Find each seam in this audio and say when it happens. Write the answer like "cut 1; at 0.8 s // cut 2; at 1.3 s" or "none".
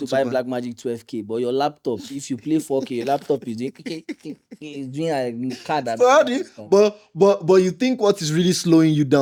none